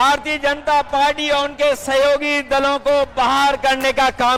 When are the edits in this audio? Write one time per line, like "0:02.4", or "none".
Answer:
none